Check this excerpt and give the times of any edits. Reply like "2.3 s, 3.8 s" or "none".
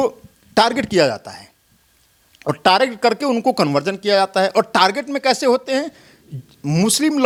none

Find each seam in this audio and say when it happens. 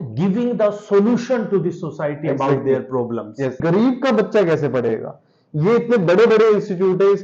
3.6 s

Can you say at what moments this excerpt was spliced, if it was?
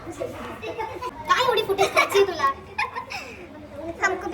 1.1 s

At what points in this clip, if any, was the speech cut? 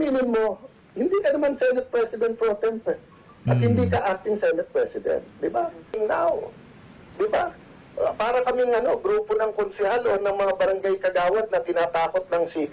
6.0 s

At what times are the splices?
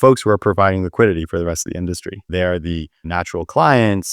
2.3 s, 3.1 s

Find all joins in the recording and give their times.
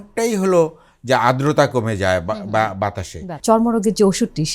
3.3 s

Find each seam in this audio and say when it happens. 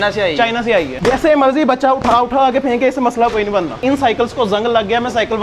0.9 s, 3.8 s

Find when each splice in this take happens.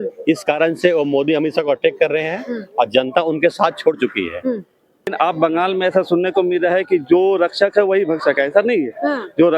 5.1 s

